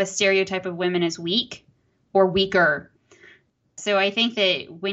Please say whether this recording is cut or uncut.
cut